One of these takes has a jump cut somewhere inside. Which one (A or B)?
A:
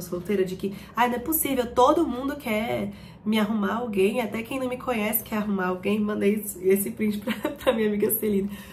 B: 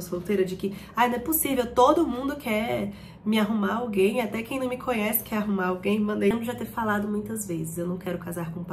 B